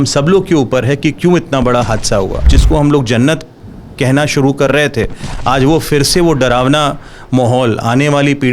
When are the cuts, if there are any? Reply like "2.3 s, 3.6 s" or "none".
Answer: 2.5 s

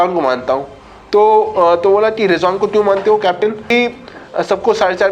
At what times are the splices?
3.7 s

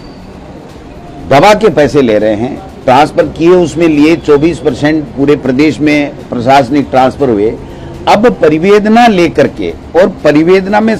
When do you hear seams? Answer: none

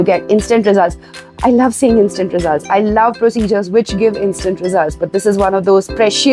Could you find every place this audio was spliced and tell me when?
none

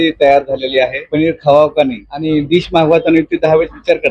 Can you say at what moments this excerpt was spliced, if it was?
1.0 s, 2.1 s

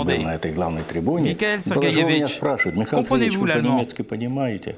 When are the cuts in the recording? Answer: none

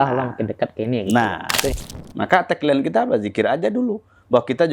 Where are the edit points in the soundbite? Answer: 1.8 s

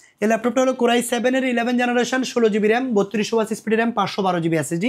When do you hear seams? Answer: none

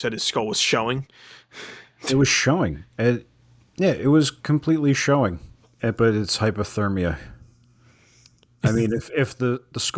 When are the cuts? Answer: none

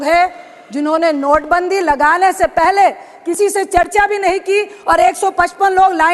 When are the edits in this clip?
none

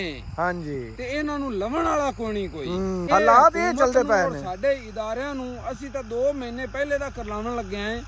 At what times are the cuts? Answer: none

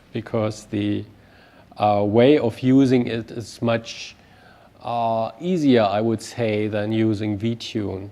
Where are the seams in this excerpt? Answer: 3.7 s

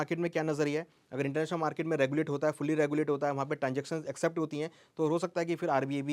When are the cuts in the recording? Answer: none

